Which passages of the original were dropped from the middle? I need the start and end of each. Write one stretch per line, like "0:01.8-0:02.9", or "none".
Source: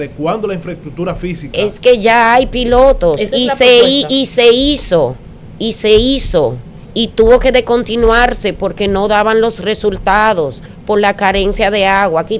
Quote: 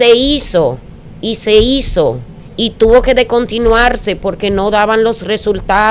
none